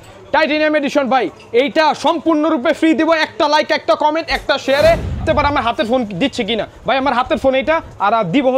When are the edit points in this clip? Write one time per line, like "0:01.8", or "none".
0:05.2